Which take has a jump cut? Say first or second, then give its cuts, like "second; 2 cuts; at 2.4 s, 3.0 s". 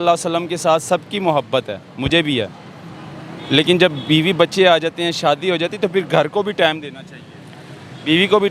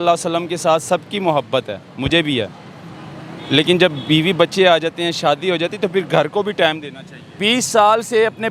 second; 1 cut; at 7.3 s